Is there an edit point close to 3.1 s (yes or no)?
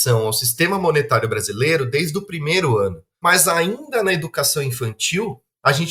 yes